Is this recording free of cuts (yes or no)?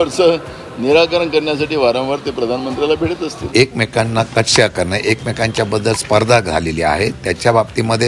no